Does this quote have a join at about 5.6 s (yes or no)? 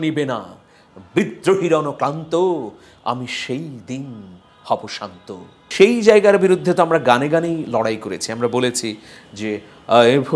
yes